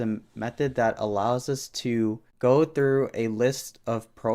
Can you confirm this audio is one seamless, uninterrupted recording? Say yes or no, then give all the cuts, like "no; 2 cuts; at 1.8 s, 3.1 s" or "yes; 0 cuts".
yes; 0 cuts